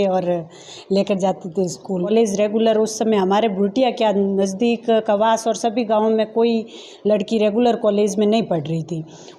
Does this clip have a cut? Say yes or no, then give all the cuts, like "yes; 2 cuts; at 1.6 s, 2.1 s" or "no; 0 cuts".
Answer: yes; 1 cut; at 2.1 s